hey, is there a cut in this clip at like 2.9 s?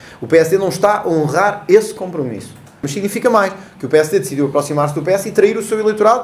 yes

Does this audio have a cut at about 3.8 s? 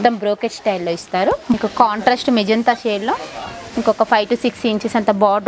no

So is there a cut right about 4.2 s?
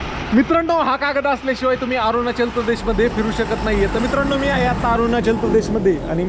no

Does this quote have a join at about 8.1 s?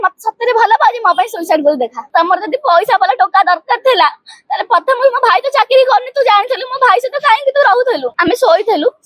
yes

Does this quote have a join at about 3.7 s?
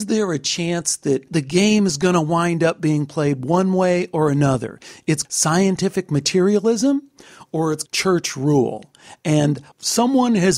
no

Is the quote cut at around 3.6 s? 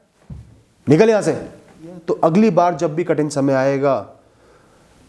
no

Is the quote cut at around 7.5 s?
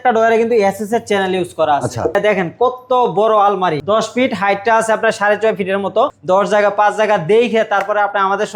no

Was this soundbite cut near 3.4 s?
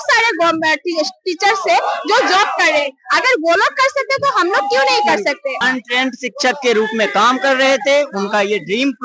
no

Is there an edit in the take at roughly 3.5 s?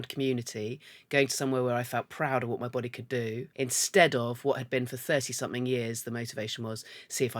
yes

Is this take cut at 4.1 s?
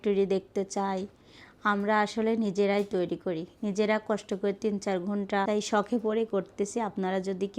no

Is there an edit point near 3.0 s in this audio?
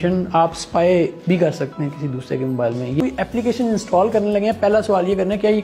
yes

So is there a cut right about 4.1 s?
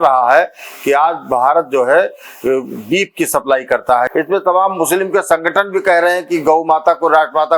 yes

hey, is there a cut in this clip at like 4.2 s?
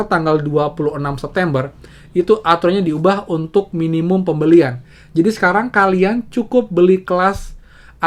no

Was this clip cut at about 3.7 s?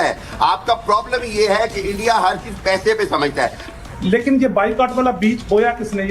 yes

